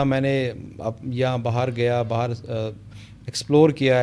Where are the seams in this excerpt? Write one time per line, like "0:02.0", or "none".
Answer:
none